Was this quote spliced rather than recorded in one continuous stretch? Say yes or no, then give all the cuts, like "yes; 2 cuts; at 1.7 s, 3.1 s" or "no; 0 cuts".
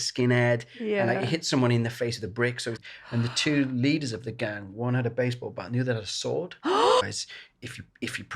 yes; 2 cuts; at 2.7 s, 7.0 s